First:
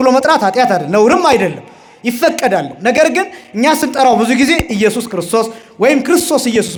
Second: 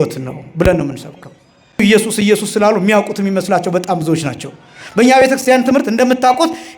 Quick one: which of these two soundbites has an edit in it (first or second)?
second